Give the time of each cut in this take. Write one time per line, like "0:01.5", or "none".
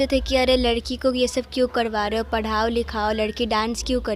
none